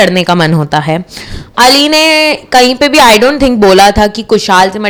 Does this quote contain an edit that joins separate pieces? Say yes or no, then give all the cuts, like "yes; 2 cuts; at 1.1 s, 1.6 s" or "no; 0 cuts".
no; 0 cuts